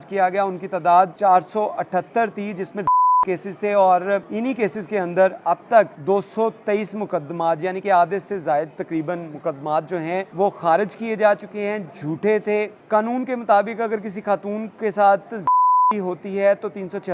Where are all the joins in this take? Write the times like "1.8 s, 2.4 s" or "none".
1.1 s, 4.3 s, 6.0 s, 10.3 s, 12.8 s